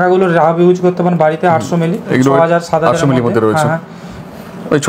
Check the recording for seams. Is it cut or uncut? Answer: uncut